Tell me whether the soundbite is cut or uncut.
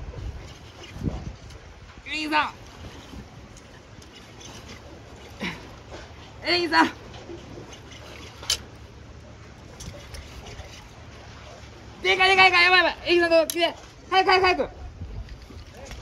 uncut